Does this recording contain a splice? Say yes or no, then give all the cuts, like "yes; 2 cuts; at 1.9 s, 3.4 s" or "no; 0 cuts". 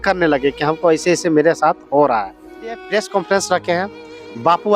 yes; 1 cut; at 2.8 s